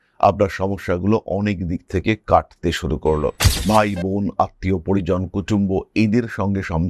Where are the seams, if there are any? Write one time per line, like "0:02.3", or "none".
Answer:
0:03.5